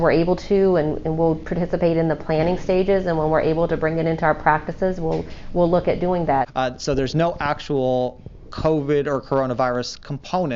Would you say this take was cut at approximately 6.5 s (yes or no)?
yes